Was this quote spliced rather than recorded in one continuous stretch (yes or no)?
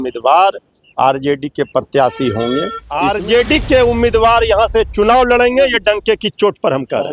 yes